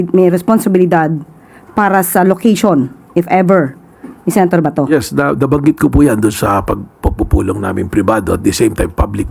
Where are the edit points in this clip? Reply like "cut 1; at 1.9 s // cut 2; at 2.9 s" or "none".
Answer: none